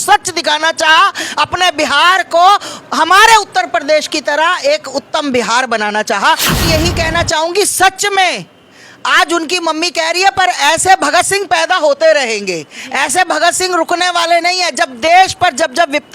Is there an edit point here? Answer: yes; 1 cut; at 6.6 s

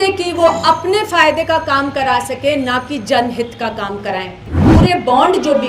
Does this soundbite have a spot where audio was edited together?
yes; 1 cut; at 4.7 s

